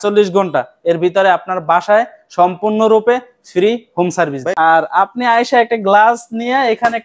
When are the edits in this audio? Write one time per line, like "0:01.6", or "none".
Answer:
0:04.5